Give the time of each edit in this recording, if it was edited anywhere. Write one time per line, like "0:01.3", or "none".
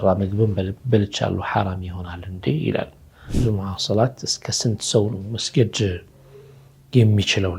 0:03.3